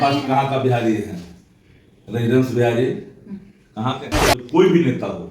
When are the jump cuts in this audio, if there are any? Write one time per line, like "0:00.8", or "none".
0:04.4